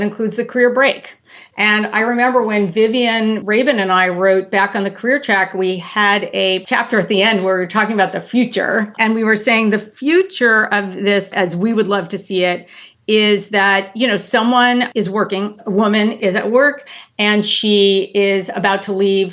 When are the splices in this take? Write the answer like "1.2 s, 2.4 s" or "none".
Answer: 3.4 s, 8.9 s